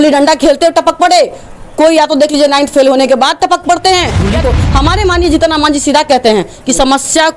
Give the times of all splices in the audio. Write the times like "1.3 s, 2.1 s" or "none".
4.4 s